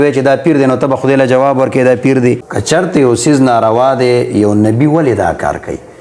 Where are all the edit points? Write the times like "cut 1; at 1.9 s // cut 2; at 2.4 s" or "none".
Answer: cut 1; at 2.5 s